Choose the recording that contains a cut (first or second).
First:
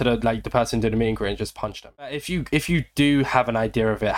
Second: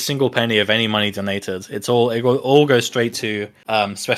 first